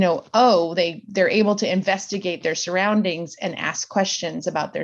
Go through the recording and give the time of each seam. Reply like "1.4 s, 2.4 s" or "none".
none